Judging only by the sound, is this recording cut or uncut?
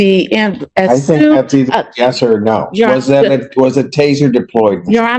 uncut